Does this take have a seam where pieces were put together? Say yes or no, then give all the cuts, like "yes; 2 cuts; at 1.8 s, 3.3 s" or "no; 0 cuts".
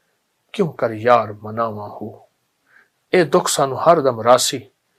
no; 0 cuts